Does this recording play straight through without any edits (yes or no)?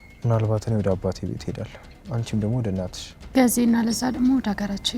yes